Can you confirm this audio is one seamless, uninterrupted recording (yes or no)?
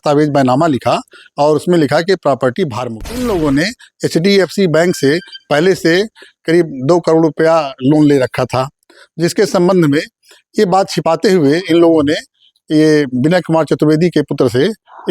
no